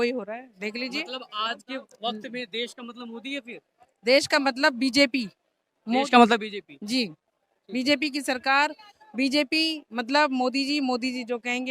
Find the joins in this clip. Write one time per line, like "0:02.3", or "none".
none